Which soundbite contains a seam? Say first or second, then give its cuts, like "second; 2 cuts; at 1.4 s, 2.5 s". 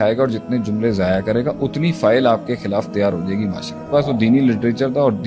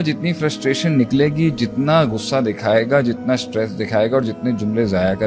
first; 1 cut; at 3.9 s